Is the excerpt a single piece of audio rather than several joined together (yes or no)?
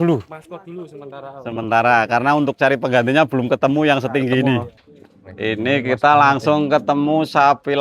no